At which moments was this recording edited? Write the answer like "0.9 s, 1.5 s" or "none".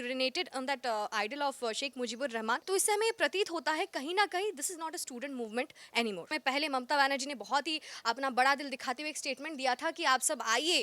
2.6 s, 6.3 s